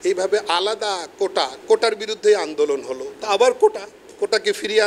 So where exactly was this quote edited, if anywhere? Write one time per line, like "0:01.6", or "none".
none